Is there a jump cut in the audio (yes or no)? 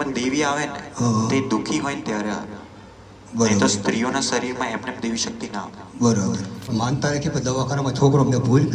yes